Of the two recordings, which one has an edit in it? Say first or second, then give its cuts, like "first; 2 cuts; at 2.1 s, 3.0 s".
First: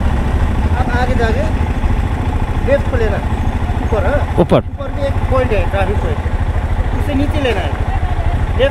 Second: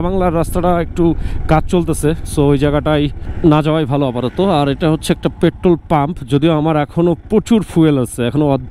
second; 1 cut; at 3.2 s